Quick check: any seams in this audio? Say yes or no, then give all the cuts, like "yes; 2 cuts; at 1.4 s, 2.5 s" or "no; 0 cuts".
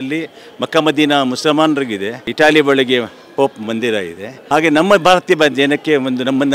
no; 0 cuts